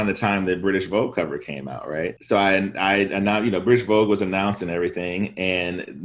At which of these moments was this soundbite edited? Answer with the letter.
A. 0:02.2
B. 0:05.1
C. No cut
C